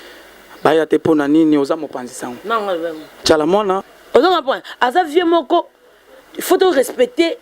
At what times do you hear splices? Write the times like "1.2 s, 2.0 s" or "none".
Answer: 3.8 s